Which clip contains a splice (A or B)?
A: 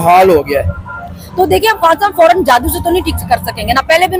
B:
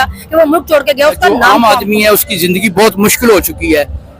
B